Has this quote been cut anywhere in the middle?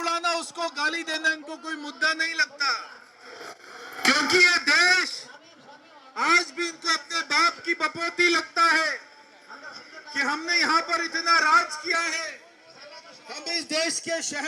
no; 0 cuts

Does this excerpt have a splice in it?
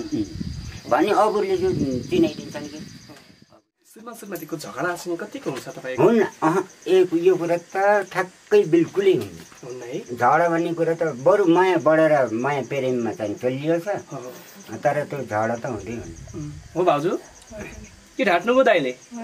yes; 1 cut; at 3.4 s

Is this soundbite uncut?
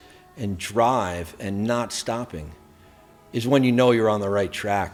yes; 0 cuts

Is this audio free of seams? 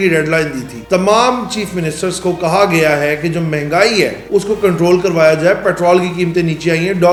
yes; 0 cuts

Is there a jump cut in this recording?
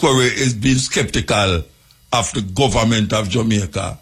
no; 0 cuts

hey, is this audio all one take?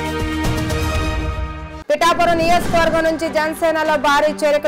no; 1 cut; at 1.6 s

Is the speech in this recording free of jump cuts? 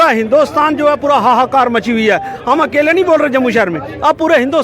yes; 0 cuts

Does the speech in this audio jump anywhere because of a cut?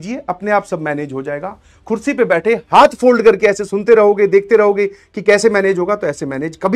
no; 0 cuts

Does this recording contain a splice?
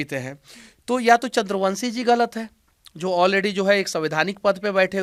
no; 0 cuts

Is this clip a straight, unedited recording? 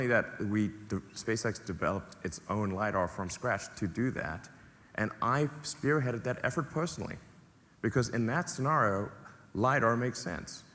yes; 0 cuts

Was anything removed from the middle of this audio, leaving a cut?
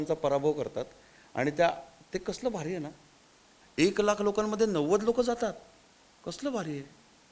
yes; 1 cut; at 3.6 s

